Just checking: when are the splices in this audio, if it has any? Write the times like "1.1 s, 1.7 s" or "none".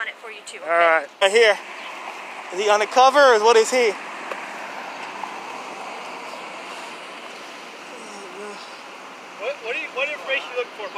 1.2 s